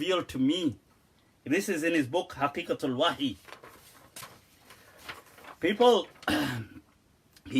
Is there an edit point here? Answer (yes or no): no